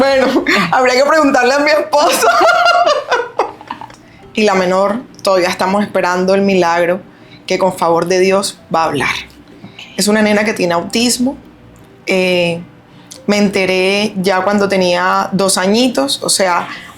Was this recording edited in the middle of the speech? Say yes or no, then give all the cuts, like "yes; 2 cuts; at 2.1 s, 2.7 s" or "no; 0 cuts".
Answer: yes; 1 cut; at 3.9 s